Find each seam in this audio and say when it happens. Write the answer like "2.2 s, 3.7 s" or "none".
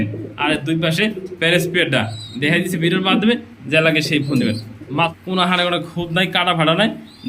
5.1 s